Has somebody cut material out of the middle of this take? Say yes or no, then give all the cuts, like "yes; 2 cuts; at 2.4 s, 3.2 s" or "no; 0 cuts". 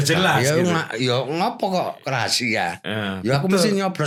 no; 0 cuts